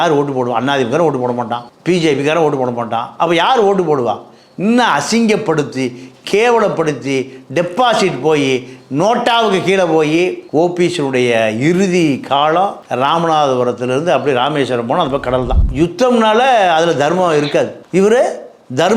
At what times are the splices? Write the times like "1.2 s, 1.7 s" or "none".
15.6 s